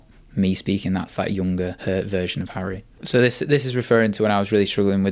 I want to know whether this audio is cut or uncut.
cut